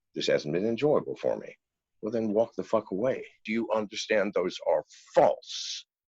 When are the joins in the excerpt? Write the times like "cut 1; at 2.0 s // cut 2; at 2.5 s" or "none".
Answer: cut 1; at 3.4 s